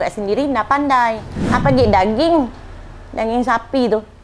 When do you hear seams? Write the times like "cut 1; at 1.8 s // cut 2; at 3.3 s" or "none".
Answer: cut 1; at 1.3 s